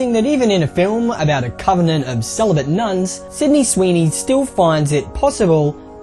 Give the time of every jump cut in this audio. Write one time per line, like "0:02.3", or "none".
none